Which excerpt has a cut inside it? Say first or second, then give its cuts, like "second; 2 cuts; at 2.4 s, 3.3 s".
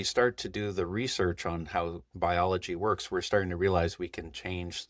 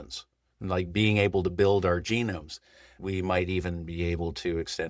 second; 1 cut; at 3.0 s